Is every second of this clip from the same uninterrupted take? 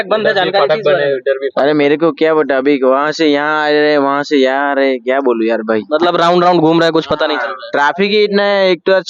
yes; 0 cuts

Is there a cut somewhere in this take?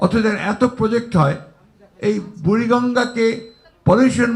no; 0 cuts

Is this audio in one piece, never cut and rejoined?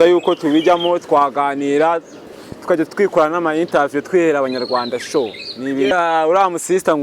no; 1 cut; at 5.9 s

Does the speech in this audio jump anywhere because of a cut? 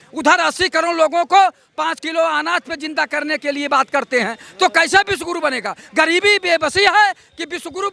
no; 0 cuts

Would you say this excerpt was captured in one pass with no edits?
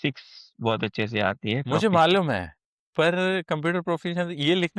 yes; 0 cuts

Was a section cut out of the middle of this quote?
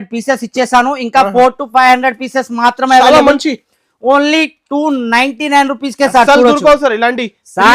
no; 0 cuts

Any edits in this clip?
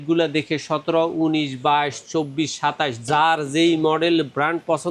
no; 0 cuts

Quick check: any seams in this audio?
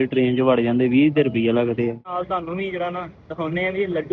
yes; 1 cut; at 2.1 s

